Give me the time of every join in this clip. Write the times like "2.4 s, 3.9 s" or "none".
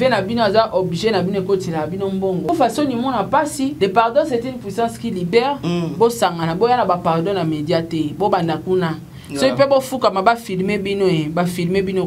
2.5 s, 3.7 s